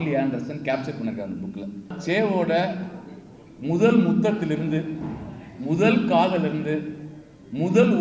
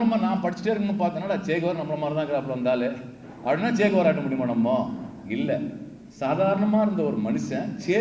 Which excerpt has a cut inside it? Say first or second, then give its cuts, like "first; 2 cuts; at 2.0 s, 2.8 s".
first; 1 cut; at 1.9 s